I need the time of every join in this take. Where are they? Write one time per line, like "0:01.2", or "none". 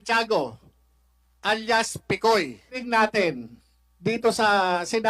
0:02.8